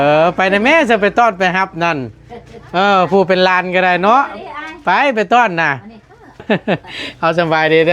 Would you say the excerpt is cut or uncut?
cut